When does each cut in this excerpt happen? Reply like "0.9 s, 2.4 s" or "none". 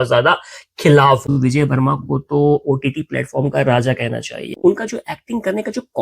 1.3 s, 4.5 s